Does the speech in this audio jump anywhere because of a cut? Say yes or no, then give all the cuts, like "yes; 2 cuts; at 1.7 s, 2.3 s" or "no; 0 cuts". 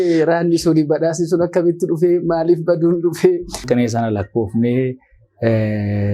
yes; 1 cut; at 3.6 s